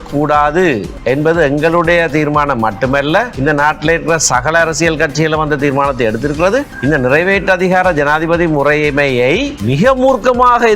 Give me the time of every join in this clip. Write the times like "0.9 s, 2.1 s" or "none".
0.9 s, 3.3 s, 6.7 s, 9.6 s